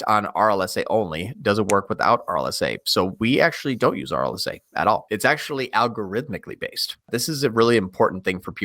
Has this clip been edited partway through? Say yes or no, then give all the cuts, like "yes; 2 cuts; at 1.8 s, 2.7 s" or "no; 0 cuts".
yes; 2 cuts; at 5.0 s, 7.1 s